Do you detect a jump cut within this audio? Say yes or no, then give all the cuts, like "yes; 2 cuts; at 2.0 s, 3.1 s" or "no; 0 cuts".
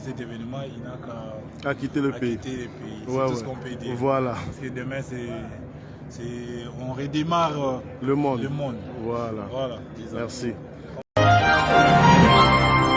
yes; 1 cut; at 11.0 s